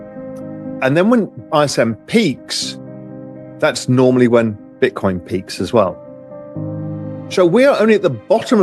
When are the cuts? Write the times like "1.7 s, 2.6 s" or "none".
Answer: 6.0 s, 7.3 s